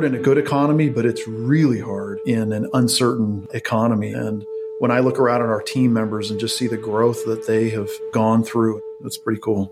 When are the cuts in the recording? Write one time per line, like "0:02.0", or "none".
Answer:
0:08.0
0:08.8